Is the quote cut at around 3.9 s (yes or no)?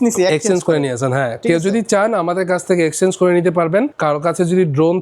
yes